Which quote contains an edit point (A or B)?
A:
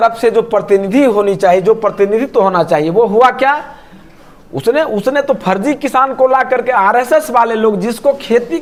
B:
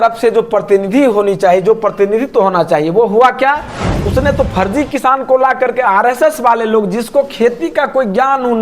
B